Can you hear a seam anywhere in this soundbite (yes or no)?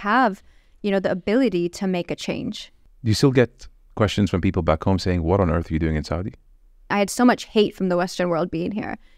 yes